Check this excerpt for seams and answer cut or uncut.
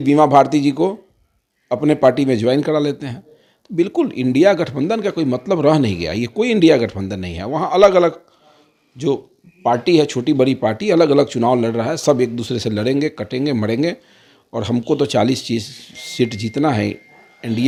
uncut